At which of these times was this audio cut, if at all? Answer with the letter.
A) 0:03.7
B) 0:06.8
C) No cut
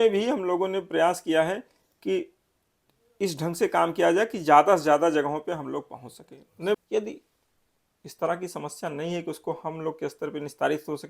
B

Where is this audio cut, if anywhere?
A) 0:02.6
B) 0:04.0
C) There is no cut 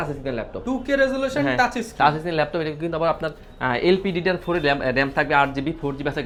C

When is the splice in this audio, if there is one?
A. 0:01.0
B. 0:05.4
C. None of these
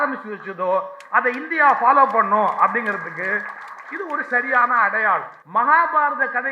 B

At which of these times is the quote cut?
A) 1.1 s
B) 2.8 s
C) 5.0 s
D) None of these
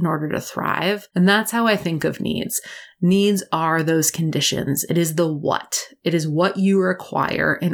A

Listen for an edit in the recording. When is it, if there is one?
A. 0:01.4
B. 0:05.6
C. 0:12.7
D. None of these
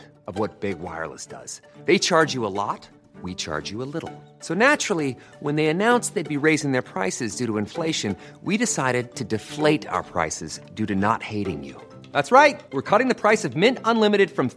D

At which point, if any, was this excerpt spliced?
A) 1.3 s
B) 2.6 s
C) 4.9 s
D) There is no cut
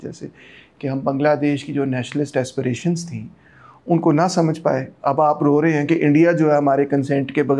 C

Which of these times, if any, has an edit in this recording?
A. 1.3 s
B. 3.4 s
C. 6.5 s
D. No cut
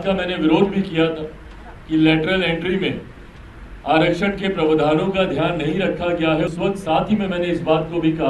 C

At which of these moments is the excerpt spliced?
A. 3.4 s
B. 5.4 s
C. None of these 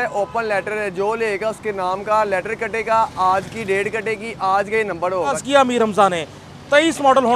B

